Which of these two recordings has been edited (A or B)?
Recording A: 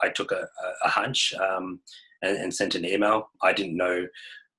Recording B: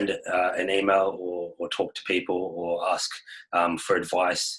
A